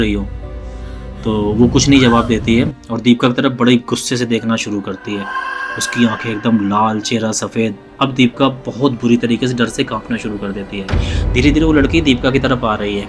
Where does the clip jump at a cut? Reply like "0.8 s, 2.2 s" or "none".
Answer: none

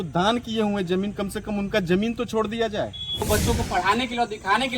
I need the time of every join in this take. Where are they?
3.3 s

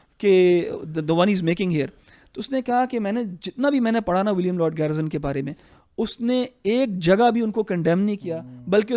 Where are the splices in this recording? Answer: none

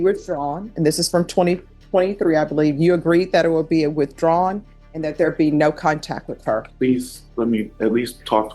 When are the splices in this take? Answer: 6.7 s

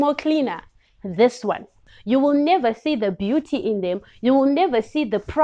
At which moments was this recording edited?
1.9 s

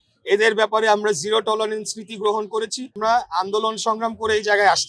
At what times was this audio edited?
3.0 s

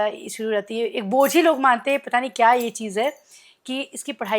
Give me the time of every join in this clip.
none

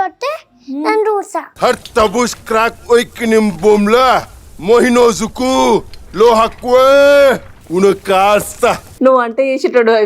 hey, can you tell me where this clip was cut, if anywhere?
8.9 s

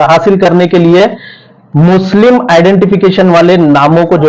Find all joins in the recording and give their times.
none

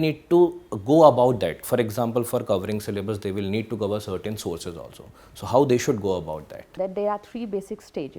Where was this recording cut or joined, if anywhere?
6.7 s

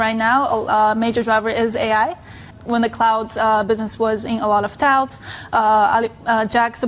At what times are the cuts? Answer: 2.5 s

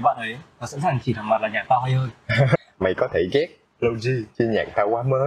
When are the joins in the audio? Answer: 2.6 s, 4.3 s

